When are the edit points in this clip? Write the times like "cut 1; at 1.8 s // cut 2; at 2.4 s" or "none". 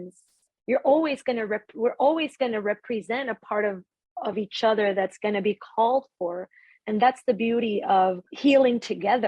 cut 1; at 8.3 s